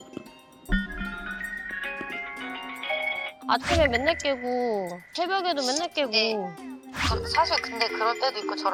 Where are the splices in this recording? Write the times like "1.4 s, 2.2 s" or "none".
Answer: none